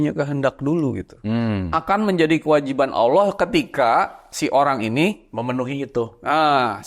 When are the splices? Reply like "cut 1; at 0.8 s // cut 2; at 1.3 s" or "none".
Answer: cut 1; at 1.6 s